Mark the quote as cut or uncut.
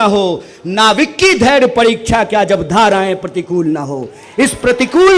uncut